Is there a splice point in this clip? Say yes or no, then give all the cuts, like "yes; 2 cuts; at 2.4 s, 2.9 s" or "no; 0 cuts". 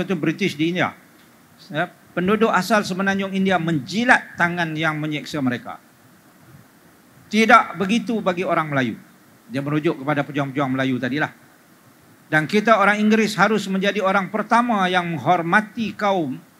no; 0 cuts